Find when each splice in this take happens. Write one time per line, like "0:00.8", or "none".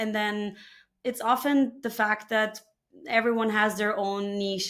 none